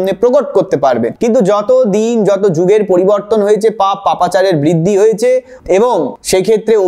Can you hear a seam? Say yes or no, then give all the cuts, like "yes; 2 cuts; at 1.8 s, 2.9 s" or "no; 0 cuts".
yes; 1 cut; at 1.1 s